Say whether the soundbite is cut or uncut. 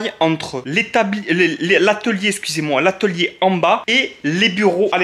uncut